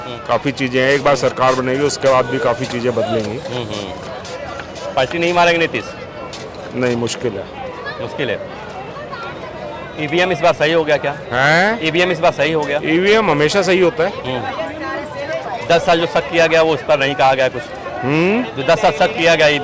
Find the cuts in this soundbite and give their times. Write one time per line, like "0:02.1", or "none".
none